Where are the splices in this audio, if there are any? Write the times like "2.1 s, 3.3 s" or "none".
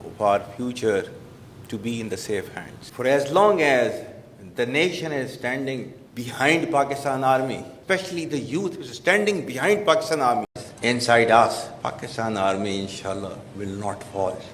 10.6 s